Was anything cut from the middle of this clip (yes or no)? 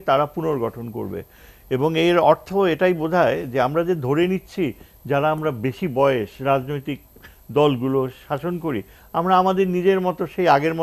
no